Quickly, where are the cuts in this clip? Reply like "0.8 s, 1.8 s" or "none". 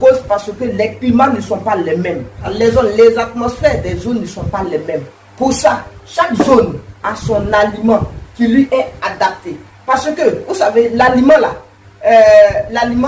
2.5 s

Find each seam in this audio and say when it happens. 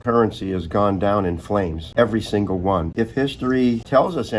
2.9 s

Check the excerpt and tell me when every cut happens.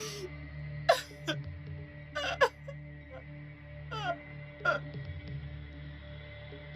4.8 s

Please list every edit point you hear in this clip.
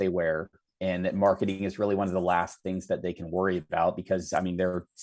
none

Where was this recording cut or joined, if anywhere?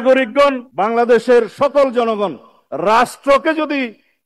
none

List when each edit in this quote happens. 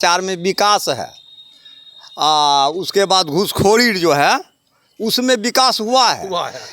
none

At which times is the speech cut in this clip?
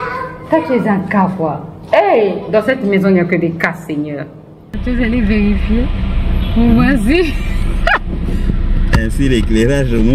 4.8 s

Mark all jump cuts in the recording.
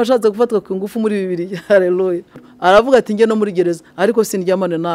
2.5 s

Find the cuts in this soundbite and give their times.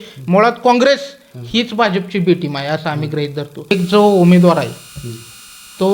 3.7 s

